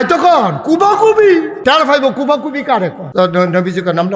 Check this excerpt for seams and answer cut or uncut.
cut